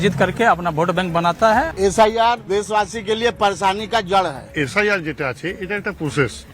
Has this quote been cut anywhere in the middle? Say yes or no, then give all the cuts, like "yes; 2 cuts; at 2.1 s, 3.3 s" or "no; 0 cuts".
yes; 3 cuts; at 1.7 s, 2.5 s, 4.5 s